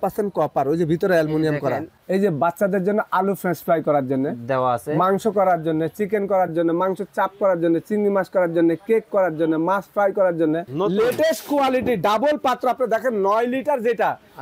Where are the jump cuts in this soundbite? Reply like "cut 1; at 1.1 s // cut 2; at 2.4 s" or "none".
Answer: cut 1; at 1.9 s // cut 2; at 10.7 s